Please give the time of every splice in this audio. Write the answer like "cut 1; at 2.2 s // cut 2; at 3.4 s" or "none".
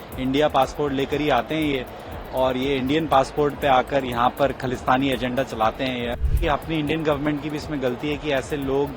cut 1; at 6.3 s

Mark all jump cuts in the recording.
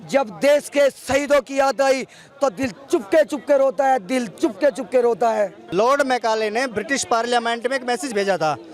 cut 1; at 5.6 s

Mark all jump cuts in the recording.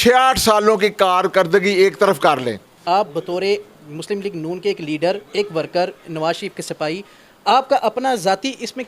cut 1; at 2.7 s

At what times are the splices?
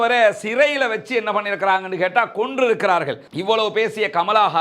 cut 1; at 3.3 s

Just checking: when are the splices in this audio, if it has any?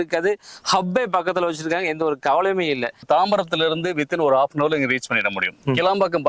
cut 1; at 3.0 s

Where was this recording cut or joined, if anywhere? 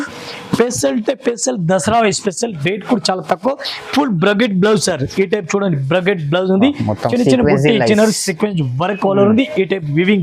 none

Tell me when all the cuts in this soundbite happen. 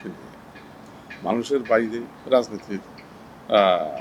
cut 1; at 2.1 s

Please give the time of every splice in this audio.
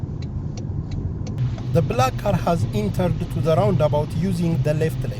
cut 1; at 1.4 s

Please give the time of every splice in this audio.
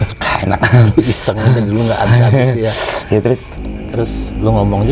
cut 1; at 3.5 s

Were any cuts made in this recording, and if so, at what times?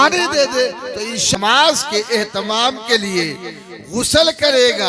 cut 1; at 1.2 s

